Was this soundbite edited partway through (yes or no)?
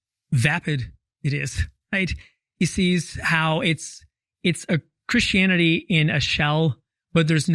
no